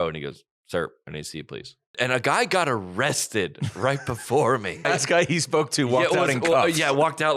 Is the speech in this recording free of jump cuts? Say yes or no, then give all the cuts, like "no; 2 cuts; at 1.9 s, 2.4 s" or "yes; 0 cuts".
no; 2 cuts; at 1.9 s, 4.8 s